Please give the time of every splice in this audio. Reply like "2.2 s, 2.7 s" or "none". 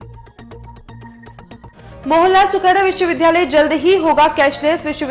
1.7 s